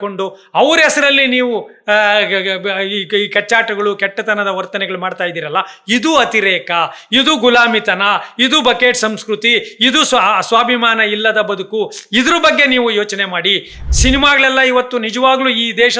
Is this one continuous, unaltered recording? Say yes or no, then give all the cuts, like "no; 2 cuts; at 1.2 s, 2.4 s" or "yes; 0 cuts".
no; 1 cut; at 13.8 s